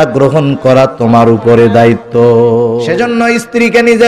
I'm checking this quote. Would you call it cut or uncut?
cut